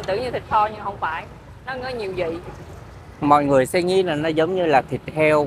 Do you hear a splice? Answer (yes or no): no